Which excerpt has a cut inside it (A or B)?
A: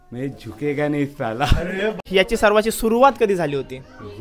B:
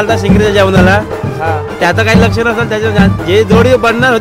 A